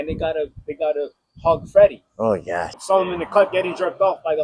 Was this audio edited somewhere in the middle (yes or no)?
yes